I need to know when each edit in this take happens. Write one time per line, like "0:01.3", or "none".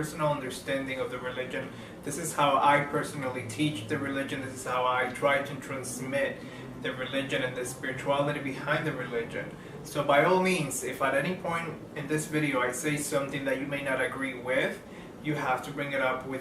0:08.2